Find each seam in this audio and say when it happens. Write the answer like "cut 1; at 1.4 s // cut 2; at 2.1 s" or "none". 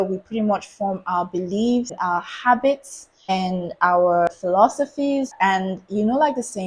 cut 1; at 1.9 s // cut 2; at 3.3 s // cut 3; at 4.3 s // cut 4; at 5.3 s